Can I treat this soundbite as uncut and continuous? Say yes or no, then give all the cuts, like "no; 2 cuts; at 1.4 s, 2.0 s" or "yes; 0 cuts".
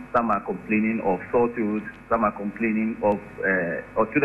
yes; 0 cuts